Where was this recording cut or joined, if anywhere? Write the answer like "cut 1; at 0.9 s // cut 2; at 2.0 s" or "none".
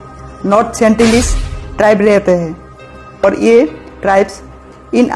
cut 1; at 3.2 s